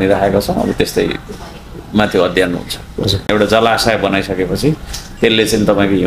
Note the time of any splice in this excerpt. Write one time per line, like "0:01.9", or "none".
0:03.3